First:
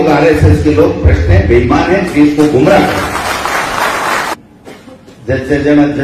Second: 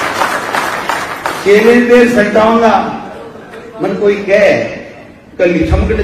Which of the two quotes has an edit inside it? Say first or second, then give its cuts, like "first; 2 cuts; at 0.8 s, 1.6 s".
first; 1 cut; at 4.3 s